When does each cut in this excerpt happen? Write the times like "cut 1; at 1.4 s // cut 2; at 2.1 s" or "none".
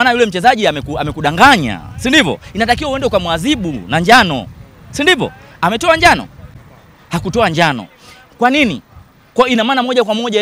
none